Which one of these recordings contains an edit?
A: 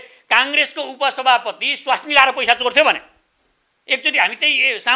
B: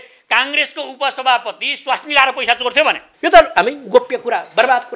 B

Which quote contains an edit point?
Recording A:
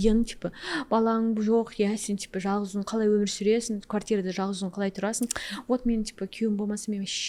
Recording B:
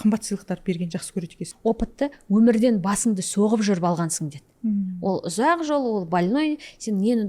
B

